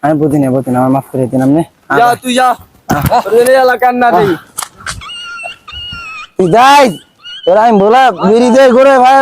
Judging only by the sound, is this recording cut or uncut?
cut